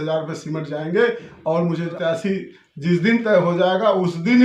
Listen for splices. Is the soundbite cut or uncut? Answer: cut